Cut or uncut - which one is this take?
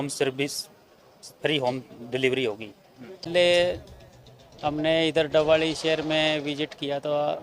cut